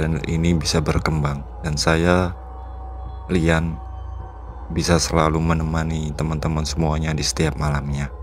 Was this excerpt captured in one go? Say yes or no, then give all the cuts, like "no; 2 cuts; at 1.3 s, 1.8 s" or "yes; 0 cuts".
yes; 0 cuts